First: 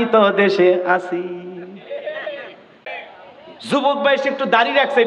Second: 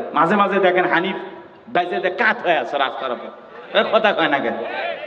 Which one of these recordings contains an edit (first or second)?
first